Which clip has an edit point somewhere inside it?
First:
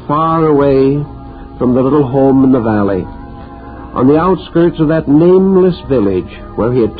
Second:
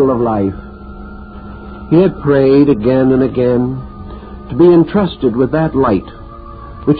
first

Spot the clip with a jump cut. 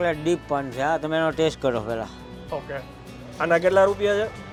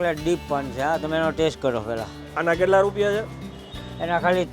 second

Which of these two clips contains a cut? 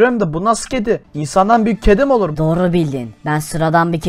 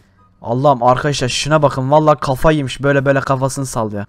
first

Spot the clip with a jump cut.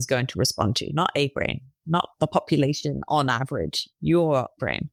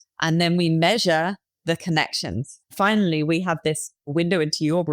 second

